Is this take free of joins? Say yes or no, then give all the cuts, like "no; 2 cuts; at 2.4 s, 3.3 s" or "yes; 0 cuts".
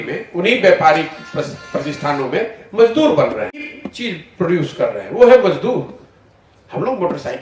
no; 1 cut; at 3.7 s